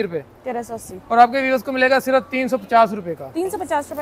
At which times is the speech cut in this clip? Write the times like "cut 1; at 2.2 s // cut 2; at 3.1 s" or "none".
none